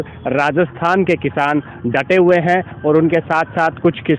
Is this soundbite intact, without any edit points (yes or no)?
yes